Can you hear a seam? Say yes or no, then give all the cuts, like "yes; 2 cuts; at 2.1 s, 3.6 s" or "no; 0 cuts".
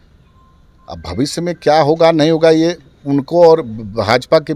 no; 0 cuts